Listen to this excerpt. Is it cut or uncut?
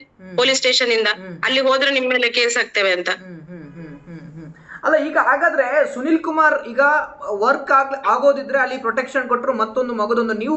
uncut